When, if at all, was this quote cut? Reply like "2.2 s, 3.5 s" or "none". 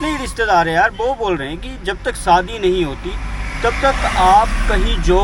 none